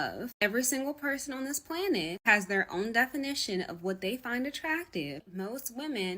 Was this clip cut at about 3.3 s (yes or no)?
no